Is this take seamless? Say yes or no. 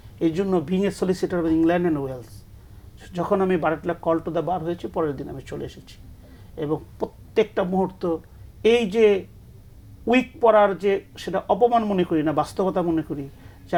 yes